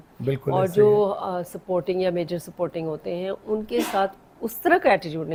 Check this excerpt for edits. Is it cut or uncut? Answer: uncut